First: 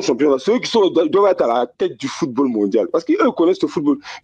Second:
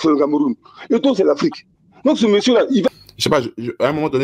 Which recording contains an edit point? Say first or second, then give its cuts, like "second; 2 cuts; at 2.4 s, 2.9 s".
second; 1 cut; at 2.9 s